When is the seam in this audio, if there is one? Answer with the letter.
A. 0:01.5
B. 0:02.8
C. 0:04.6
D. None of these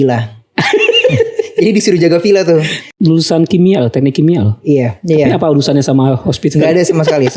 B